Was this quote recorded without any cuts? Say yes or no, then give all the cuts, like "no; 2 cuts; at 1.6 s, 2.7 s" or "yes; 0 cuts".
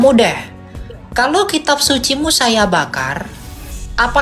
yes; 0 cuts